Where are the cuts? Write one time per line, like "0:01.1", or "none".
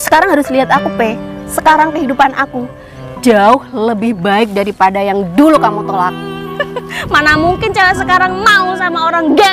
0:06.6

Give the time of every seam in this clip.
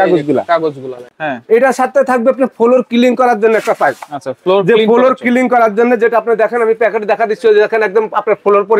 0:01.0

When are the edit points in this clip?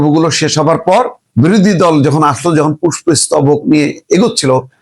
0:01.2

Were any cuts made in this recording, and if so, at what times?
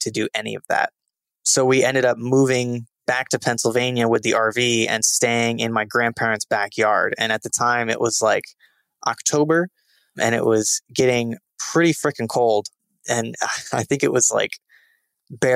none

